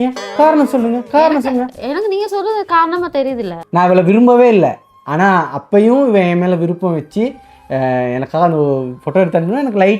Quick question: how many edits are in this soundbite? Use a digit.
1